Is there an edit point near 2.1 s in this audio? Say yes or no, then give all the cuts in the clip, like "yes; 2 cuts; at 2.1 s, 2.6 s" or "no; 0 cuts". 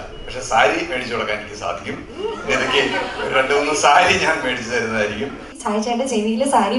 no; 1 cut; at 5.5 s